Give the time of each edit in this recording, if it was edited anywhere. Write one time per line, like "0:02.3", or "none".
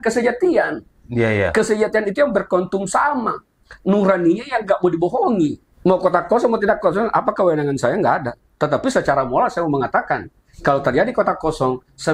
0:05.7

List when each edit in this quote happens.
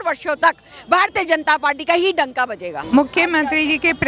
0:02.7

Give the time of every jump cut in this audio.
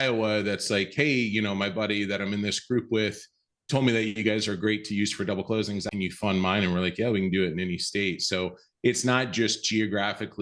0:05.9

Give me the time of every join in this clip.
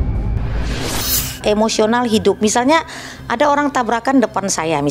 0:01.2

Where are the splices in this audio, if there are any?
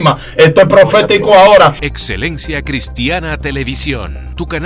0:01.8

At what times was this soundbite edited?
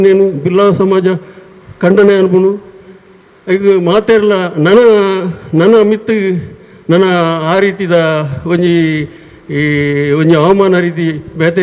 none

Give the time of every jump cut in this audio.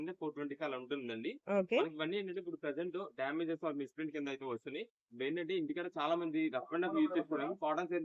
none

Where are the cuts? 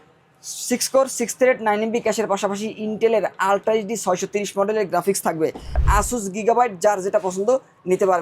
0:05.8

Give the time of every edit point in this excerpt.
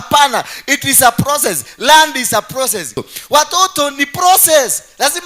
0:03.1

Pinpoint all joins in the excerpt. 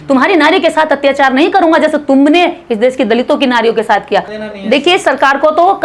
0:04.3

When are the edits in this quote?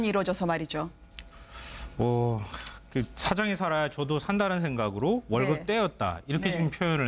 0:05.7

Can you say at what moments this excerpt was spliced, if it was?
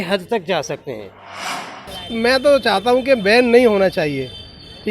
0:01.7

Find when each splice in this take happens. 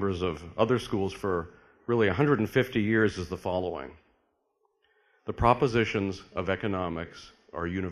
0:03.6

